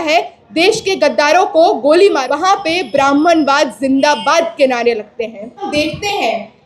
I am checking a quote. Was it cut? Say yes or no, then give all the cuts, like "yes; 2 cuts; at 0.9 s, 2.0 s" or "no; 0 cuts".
yes; 2 cuts; at 2.2 s, 5.7 s